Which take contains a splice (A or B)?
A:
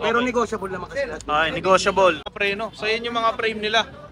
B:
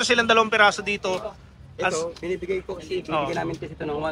A